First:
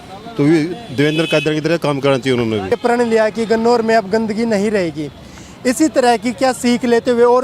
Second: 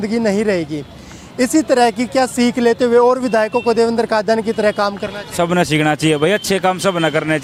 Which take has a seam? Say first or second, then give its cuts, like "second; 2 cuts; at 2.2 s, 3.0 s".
first; 1 cut; at 2.7 s